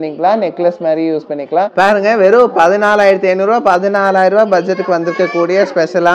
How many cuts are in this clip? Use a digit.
1